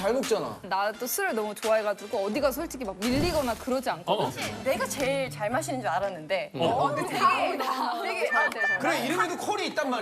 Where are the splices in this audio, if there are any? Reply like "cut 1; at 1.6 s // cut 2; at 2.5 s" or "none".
cut 1; at 4.5 s